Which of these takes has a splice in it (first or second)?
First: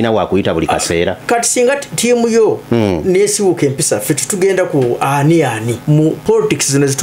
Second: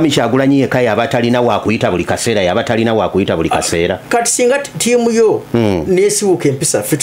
first